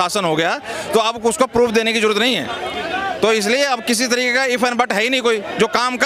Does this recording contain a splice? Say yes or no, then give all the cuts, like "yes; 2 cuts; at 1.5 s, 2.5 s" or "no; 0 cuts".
no; 0 cuts